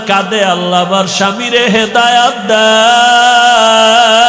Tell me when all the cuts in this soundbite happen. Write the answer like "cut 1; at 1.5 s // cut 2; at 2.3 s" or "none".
none